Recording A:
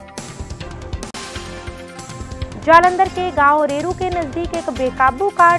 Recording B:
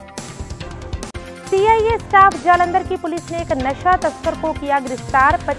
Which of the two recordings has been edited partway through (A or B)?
A